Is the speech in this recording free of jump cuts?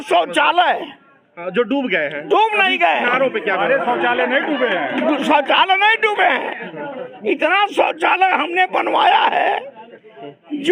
yes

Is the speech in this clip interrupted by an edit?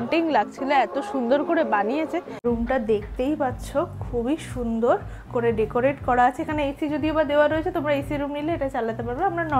yes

